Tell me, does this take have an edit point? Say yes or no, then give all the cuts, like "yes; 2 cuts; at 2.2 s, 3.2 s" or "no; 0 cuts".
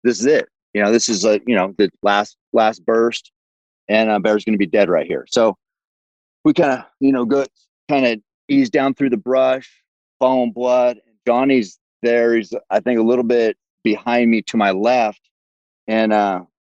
no; 0 cuts